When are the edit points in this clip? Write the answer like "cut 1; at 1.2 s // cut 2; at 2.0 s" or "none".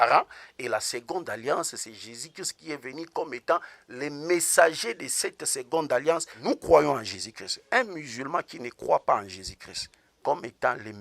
cut 1; at 6.3 s